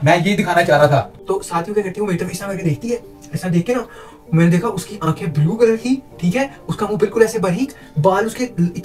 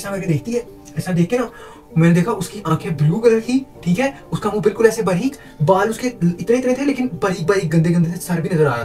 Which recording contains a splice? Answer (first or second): first